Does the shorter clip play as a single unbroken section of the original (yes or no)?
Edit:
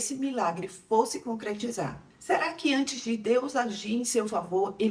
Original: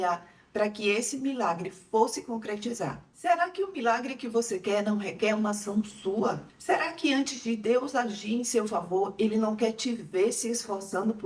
no